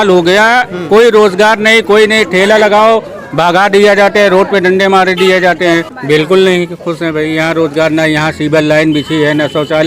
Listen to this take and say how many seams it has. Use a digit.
1